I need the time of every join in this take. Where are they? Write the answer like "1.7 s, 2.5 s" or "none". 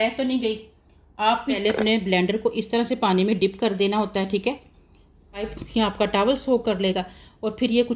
1.6 s, 5.6 s